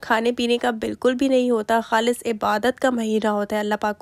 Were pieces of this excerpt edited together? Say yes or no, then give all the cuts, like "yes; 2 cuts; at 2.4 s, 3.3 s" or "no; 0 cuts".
no; 0 cuts